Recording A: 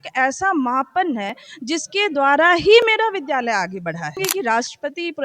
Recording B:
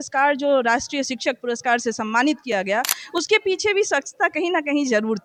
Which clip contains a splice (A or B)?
A